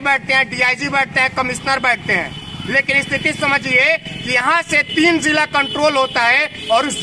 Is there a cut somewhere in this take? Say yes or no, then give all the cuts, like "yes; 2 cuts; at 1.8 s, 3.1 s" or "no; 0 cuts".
no; 0 cuts